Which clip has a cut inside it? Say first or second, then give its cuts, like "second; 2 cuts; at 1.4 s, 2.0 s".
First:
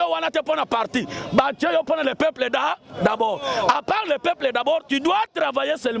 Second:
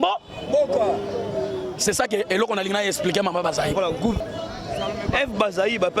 second; 1 cut; at 4.3 s